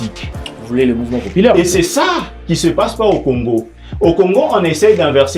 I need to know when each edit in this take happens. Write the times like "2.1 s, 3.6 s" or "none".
none